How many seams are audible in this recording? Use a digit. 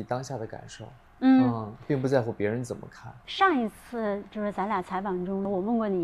1